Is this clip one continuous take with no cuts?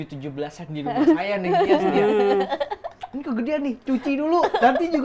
yes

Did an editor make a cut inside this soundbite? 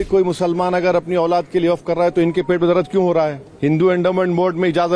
yes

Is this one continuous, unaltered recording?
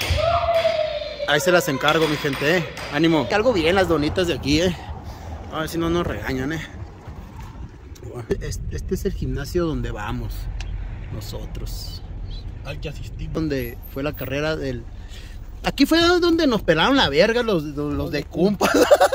no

